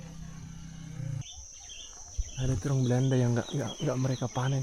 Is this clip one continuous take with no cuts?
no; 1 cut; at 1.2 s

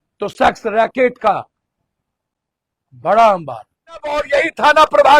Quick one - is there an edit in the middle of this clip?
yes; 1 cut; at 4.2 s

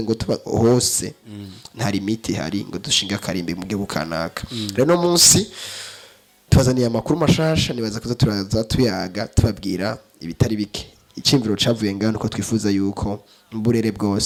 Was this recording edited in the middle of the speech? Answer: no; 0 cuts

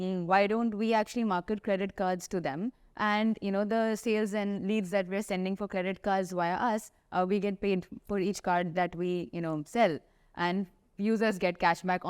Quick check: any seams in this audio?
no; 0 cuts

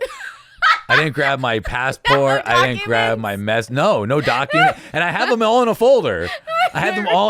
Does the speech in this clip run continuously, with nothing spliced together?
yes; 0 cuts

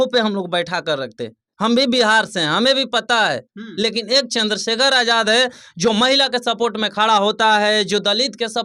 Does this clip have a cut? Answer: no; 0 cuts

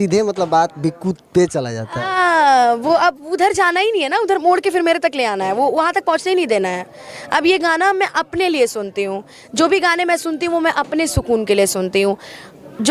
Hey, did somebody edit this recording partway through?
no; 0 cuts

